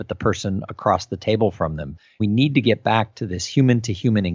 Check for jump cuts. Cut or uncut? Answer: cut